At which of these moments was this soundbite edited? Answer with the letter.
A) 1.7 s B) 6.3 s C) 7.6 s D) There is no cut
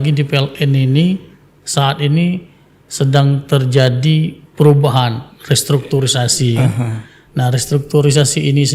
D